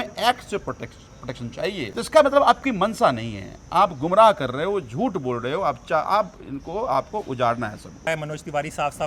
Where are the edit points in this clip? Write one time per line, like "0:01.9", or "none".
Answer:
0:01.9
0:08.1

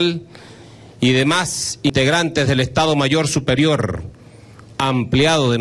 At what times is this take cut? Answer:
0:01.9

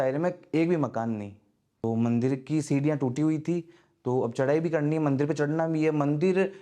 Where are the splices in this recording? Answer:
0:01.8

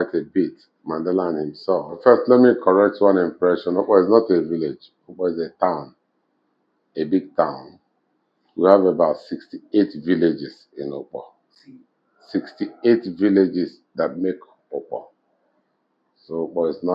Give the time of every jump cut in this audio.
0:02.0

